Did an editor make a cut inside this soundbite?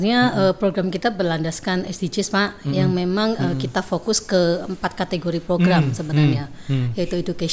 no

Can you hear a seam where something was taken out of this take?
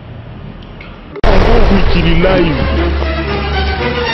yes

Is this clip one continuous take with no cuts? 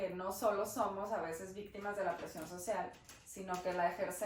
yes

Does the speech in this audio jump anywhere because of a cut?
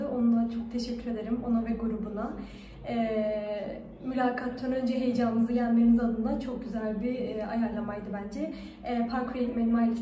no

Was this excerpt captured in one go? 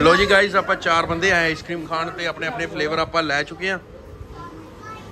yes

